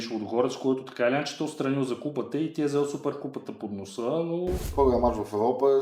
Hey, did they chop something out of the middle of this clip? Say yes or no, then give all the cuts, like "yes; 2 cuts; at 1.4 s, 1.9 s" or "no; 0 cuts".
yes; 1 cut; at 4.7 s